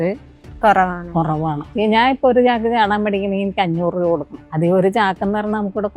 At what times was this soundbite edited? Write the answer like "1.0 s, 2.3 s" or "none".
1.6 s, 4.4 s